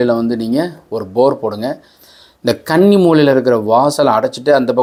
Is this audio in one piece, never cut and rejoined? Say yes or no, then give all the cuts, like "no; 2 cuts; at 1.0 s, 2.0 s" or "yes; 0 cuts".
yes; 0 cuts